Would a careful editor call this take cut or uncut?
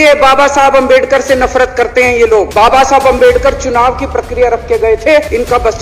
uncut